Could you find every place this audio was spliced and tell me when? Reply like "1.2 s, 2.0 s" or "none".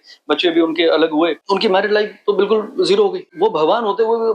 1.4 s, 3.3 s